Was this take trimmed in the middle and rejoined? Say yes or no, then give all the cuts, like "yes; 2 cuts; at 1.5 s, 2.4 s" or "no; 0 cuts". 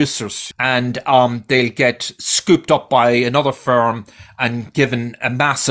no; 0 cuts